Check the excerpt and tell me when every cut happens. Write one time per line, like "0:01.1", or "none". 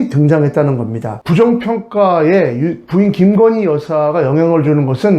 0:01.2